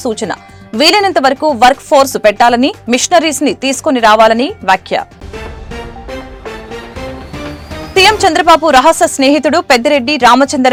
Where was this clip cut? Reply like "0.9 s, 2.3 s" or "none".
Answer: none